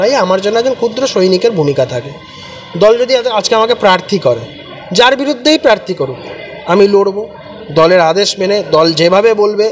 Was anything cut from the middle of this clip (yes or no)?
no